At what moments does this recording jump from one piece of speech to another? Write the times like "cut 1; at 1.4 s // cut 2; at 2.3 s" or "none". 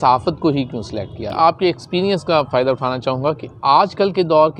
cut 1; at 1.2 s